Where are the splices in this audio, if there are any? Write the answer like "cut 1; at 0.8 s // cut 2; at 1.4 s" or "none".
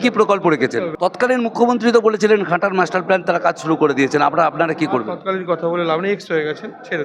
cut 1; at 0.9 s